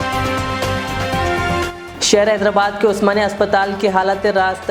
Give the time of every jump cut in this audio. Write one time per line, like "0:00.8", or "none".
0:01.8